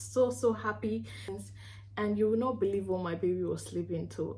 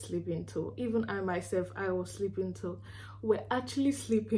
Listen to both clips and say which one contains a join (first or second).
first